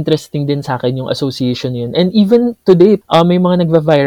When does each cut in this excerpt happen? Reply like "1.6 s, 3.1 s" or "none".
3.0 s